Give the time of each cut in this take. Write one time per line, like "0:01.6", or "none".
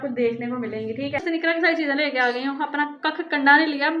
0:01.2